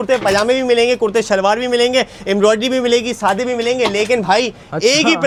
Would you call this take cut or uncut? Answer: uncut